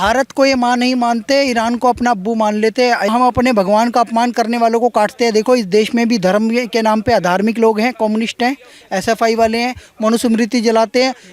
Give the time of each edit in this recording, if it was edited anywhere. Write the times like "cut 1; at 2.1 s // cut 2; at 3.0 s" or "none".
cut 1; at 3.1 s